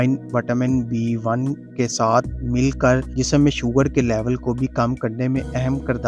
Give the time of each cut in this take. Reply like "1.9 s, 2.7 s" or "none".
none

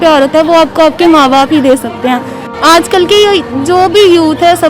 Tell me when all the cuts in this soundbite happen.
2.5 s

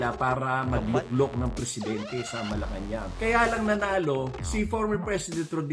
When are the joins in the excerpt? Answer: 3.1 s

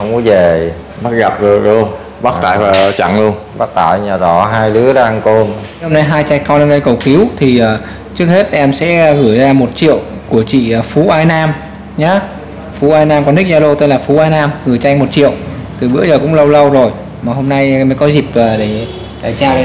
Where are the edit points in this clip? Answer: 5.9 s

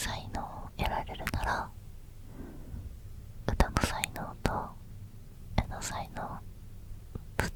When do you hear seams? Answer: none

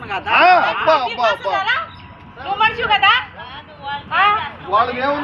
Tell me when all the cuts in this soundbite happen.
none

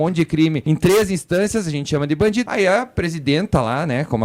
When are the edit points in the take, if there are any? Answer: 2.5 s

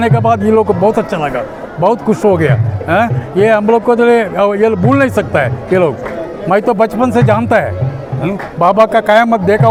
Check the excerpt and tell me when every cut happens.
none

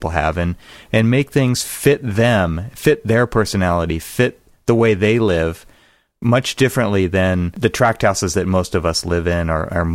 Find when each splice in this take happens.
7.6 s

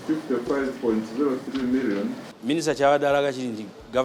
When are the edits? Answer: 2.3 s

